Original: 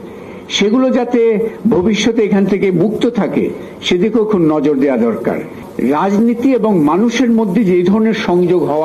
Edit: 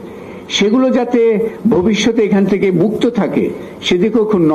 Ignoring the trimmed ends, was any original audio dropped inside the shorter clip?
no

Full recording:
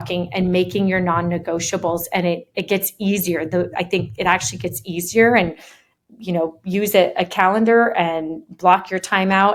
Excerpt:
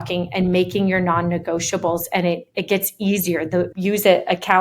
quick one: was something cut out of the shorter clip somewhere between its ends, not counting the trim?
yes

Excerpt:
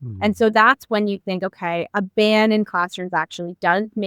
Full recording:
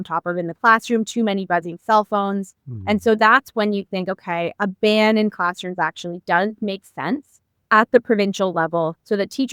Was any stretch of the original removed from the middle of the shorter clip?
no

